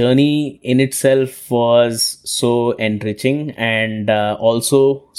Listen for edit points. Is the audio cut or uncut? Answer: uncut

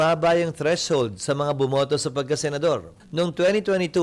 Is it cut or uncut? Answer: cut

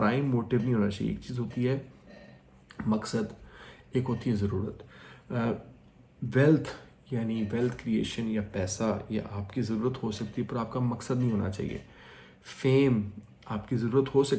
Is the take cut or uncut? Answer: uncut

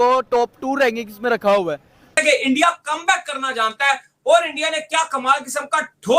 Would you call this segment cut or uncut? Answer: cut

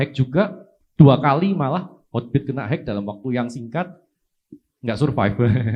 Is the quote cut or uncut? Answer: uncut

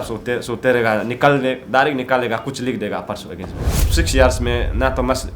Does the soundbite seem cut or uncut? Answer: cut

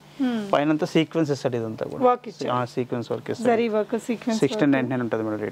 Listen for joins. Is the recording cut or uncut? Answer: uncut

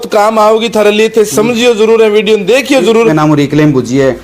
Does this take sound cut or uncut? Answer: cut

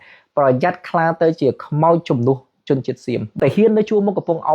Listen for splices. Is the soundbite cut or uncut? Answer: cut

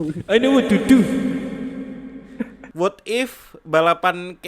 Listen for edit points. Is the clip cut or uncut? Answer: cut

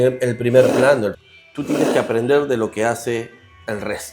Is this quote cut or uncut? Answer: cut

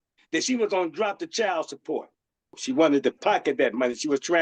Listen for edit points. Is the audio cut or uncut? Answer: cut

